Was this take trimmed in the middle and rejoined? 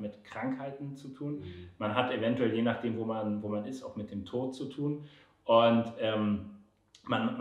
no; 0 cuts

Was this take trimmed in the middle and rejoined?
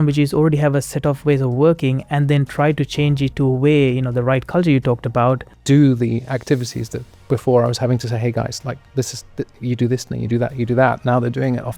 yes; 2 cuts; at 3.3 s, 5.6 s

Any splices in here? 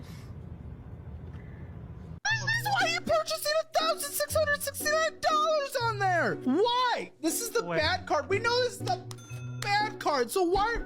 yes; 1 cut; at 2.2 s

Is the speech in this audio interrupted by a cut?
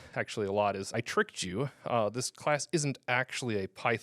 yes; 1 cut; at 0.9 s

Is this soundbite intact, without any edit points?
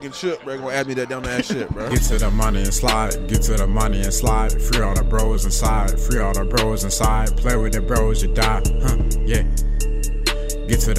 no; 1 cut; at 1.9 s

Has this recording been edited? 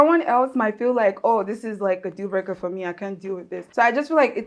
yes; 1 cut; at 3.6 s

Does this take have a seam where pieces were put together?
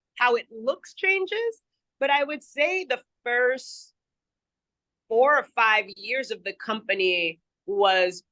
no; 0 cuts

